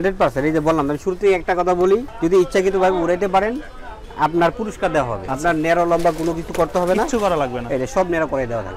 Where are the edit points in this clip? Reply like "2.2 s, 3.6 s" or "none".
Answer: 2.1 s, 5.2 s

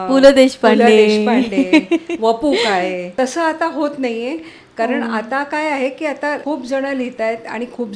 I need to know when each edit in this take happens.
3.1 s, 6.4 s

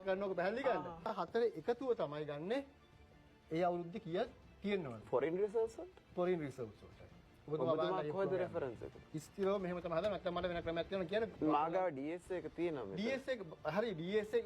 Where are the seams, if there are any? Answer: 1.1 s

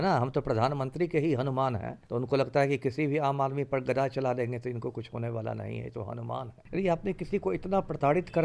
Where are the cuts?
1.9 s, 6.5 s

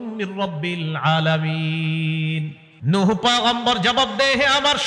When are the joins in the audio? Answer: 2.6 s

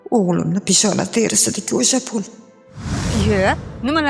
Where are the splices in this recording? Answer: 3.0 s

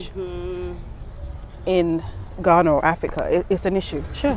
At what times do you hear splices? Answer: none

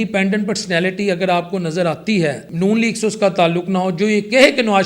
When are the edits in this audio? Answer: 2.4 s

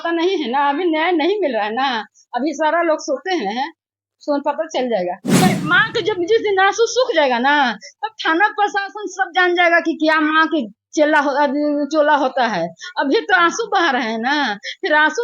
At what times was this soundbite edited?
5.5 s

